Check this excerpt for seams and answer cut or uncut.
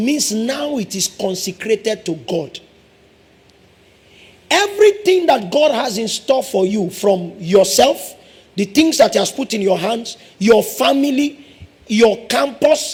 uncut